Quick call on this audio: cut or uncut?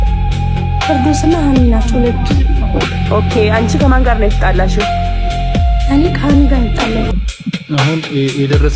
cut